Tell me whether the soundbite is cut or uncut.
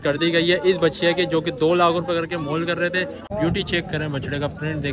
cut